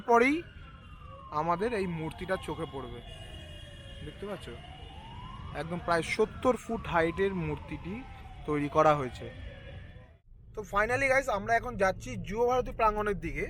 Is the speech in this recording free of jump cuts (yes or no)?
yes